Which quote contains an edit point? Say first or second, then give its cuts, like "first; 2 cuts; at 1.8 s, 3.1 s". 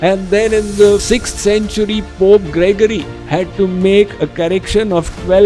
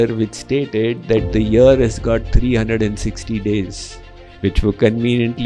first; 1 cut; at 1.0 s